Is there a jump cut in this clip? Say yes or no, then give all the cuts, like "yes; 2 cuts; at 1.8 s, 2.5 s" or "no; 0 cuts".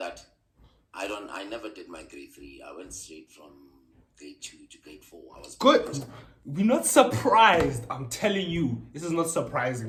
no; 0 cuts